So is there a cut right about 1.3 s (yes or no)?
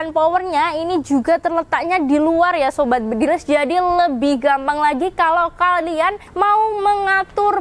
no